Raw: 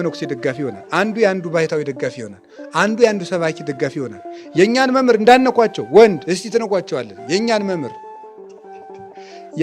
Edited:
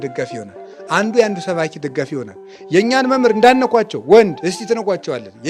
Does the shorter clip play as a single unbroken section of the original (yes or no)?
yes